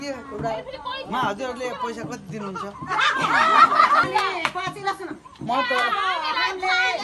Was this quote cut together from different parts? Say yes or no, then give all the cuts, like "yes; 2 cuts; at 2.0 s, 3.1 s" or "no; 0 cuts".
yes; 1 cut; at 4.0 s